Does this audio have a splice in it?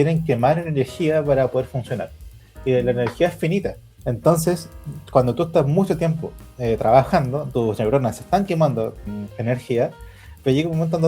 yes; 2 cuts; at 3.9 s, 7.4 s

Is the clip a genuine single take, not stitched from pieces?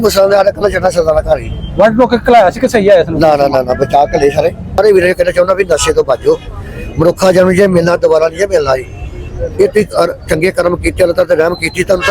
no; 1 cut; at 4.8 s

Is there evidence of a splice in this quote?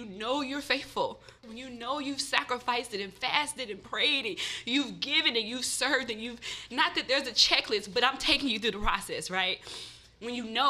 yes; 1 cut; at 1.5 s

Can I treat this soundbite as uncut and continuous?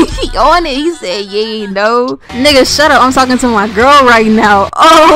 no; 1 cut; at 2.2 s

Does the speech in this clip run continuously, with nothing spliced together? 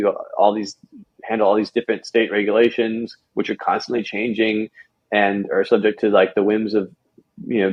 yes; 0 cuts

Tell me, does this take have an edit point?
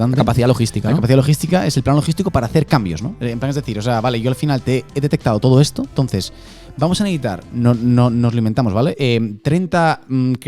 no; 0 cuts

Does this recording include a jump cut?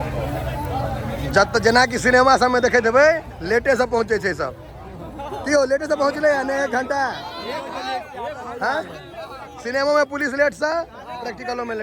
no; 0 cuts

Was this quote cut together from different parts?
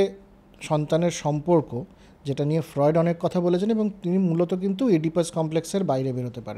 no; 0 cuts

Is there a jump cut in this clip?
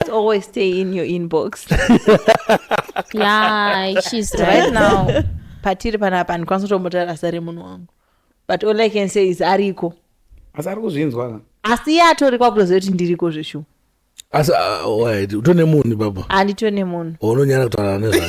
yes; 1 cut; at 5.4 s

